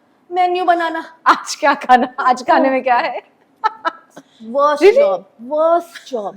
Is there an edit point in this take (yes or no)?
no